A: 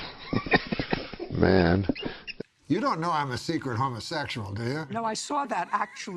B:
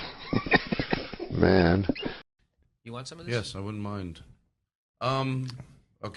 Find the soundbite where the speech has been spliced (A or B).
A